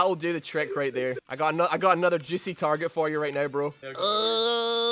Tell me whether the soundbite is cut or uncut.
cut